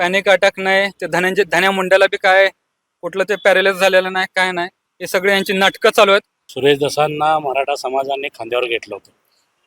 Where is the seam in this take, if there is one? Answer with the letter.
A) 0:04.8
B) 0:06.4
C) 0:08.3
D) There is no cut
B